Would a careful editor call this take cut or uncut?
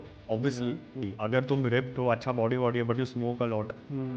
cut